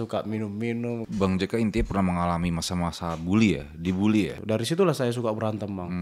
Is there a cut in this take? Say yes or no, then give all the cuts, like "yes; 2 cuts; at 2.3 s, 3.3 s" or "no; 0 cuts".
yes; 2 cuts; at 1.1 s, 4.4 s